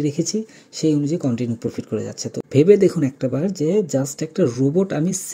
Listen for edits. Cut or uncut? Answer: cut